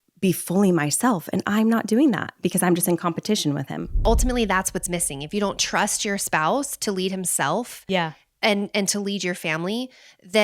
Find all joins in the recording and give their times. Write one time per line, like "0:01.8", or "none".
0:04.0